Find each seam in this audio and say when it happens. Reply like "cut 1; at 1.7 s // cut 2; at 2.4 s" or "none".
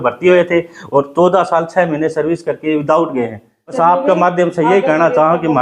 cut 1; at 3.8 s